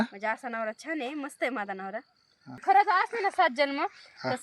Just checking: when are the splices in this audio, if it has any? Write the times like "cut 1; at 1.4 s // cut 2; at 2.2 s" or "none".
cut 1; at 2.5 s